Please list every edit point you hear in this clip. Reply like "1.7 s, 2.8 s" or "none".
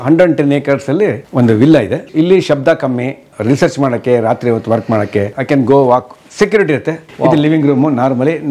1.2 s, 2.1 s, 5.4 s, 7.0 s